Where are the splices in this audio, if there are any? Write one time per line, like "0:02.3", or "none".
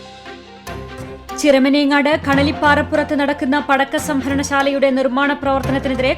0:01.2

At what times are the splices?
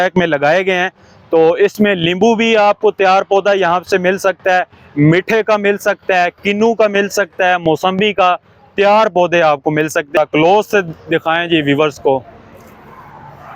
0:10.1

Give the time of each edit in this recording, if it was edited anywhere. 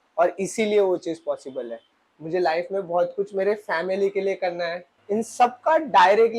0:01.9
0:04.9

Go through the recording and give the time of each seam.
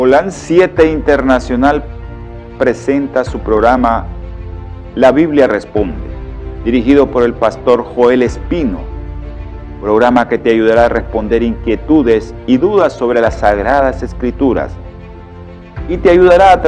0:02.8

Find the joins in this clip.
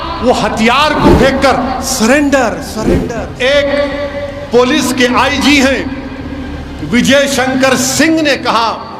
0:03.0

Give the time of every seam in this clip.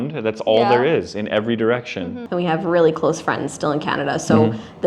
0:02.2

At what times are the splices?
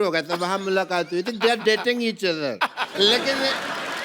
0:02.9

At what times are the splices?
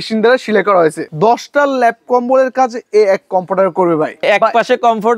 0:01.1
0:04.2

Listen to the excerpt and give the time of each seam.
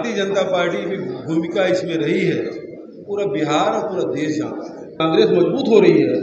0:05.0

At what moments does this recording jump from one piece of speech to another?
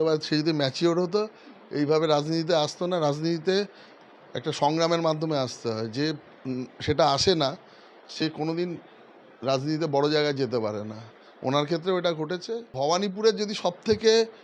0:12.7

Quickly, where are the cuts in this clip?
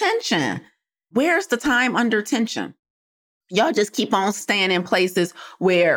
0:01.1

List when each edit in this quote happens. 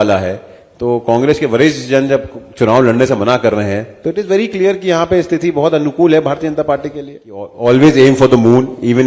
0:07.5

